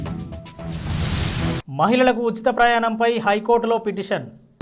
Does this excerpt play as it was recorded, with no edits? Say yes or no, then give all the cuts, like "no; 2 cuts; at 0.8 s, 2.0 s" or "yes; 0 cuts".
yes; 0 cuts